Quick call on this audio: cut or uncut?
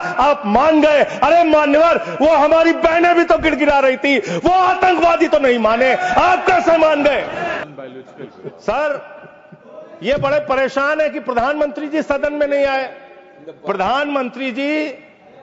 cut